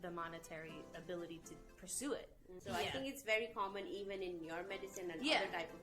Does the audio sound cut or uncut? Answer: cut